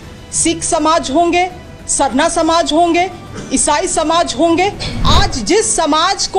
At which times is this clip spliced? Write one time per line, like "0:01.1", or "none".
0:04.9